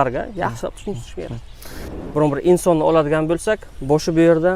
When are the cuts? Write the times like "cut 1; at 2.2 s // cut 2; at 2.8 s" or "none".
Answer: cut 1; at 1.9 s